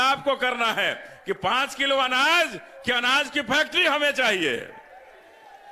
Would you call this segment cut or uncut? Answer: uncut